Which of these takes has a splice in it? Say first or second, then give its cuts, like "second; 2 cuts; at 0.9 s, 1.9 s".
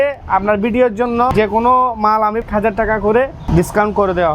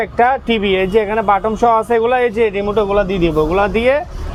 first; 3 cuts; at 1.3 s, 2.4 s, 3.4 s